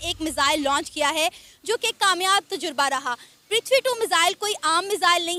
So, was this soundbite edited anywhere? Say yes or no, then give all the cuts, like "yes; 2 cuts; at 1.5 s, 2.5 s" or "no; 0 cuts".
no; 0 cuts